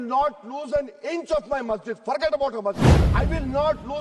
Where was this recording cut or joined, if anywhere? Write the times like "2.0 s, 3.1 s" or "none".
3.0 s